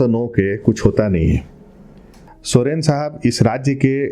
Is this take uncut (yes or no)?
no